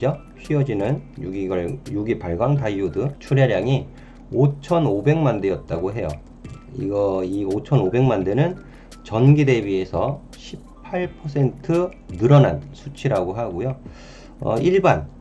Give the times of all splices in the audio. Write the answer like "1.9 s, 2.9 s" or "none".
3.2 s